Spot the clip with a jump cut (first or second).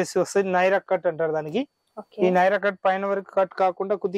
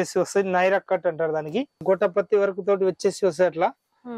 second